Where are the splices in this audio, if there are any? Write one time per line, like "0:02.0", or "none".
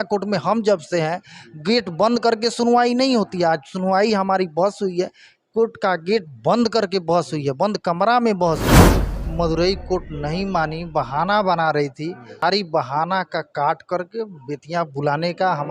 0:09.1
0:12.4